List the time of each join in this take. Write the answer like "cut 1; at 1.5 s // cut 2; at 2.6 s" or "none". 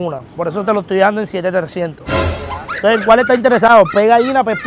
none

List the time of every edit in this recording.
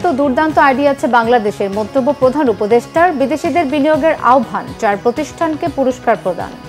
none

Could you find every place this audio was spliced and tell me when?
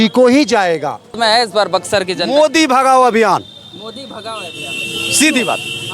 cut 1; at 1.2 s

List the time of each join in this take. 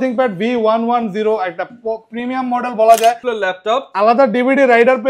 cut 1; at 3.2 s

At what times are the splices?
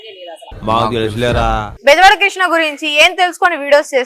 cut 1; at 1.7 s

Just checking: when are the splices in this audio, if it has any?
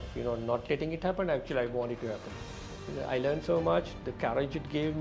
none

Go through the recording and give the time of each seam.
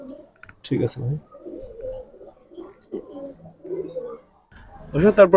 none

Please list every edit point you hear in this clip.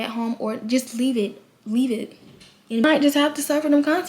cut 1; at 2.8 s

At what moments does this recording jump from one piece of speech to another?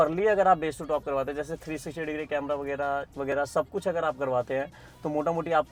none

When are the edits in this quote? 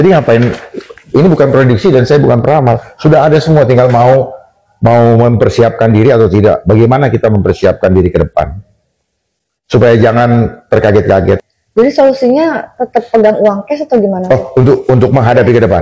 cut 1; at 11.6 s

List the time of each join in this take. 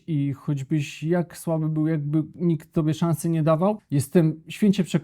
cut 1; at 3.8 s

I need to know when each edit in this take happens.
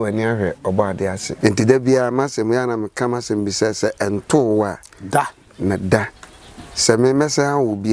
cut 1; at 1.3 s

